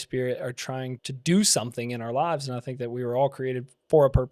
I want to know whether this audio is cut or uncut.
cut